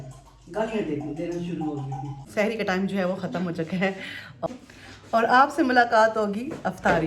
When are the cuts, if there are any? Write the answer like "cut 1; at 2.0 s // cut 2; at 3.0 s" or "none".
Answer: cut 1; at 2.2 s // cut 2; at 4.5 s